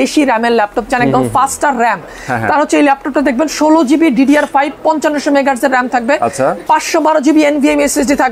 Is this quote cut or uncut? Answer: uncut